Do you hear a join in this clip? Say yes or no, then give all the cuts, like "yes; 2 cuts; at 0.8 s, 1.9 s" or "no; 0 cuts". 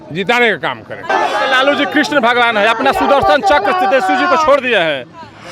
yes; 1 cut; at 1.0 s